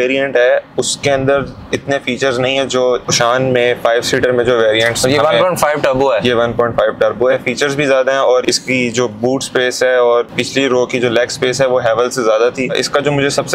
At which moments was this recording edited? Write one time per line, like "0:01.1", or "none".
0:03.1
0:07.3
0:08.4
0:10.3
0:12.7